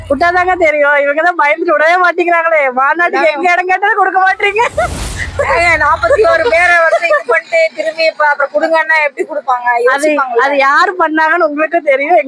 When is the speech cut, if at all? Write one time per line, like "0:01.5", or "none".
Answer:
none